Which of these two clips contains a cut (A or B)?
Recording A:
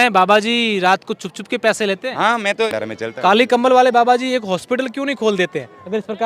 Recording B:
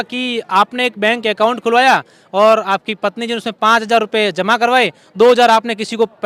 A